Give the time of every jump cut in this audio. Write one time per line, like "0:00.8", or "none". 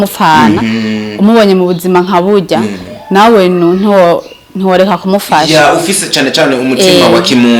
none